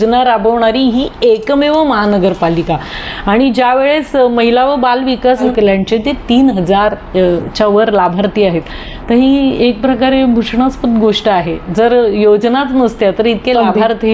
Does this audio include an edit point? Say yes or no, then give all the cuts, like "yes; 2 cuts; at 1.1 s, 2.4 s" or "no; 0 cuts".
yes; 1 cut; at 5.5 s